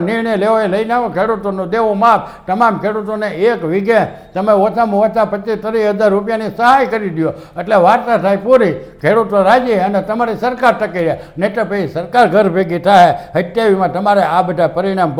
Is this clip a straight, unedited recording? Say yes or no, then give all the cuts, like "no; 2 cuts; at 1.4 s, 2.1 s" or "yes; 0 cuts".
yes; 0 cuts